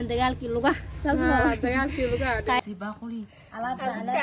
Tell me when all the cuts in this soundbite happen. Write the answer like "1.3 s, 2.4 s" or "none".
2.6 s